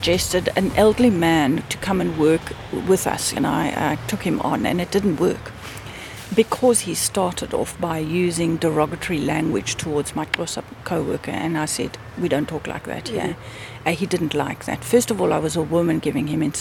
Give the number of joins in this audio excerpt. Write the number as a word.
two